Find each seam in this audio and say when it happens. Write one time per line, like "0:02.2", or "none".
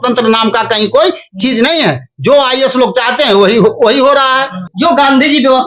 0:04.6